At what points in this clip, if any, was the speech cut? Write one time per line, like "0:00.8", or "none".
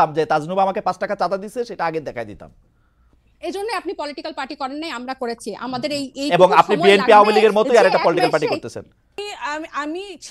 0:09.2